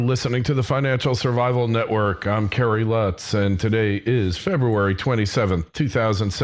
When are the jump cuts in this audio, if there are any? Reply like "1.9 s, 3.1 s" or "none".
1.3 s